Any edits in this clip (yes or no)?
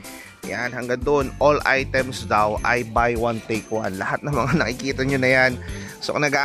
no